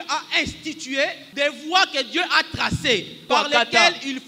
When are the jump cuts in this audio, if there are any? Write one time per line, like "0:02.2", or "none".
0:01.2
0:03.2

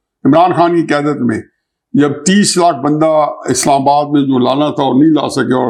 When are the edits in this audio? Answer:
none

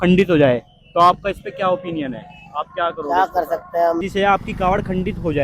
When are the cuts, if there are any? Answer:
0:04.0

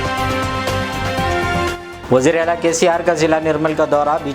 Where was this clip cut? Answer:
0:01.7

